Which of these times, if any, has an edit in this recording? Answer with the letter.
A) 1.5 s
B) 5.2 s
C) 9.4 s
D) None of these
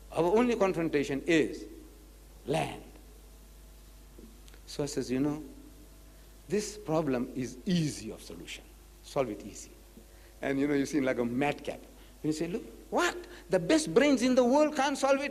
D